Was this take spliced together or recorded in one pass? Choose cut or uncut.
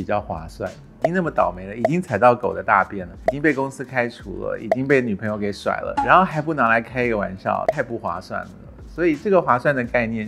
cut